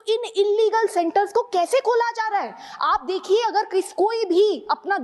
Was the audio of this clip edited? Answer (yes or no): no